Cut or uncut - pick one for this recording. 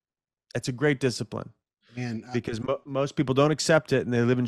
uncut